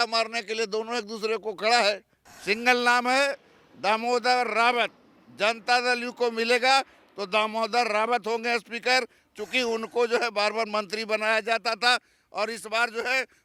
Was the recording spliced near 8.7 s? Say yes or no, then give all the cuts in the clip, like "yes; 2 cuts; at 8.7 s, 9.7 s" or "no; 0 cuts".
no; 1 cut; at 2.1 s